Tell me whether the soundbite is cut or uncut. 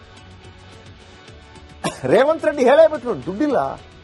cut